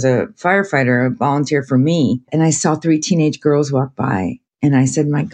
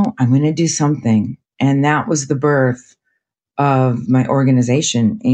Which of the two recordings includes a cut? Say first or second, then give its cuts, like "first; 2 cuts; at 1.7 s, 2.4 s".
first; 2 cuts; at 2.3 s, 4.4 s